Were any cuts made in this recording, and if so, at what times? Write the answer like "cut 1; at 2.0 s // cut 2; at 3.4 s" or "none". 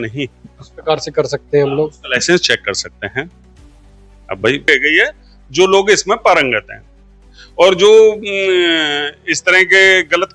cut 1; at 4.7 s